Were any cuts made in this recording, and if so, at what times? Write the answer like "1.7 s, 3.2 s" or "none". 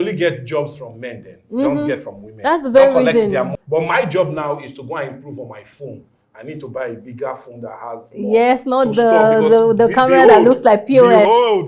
3.5 s